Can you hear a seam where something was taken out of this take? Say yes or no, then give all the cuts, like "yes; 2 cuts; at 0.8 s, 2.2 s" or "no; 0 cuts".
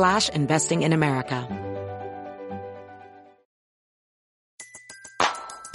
yes; 1 cut; at 1.4 s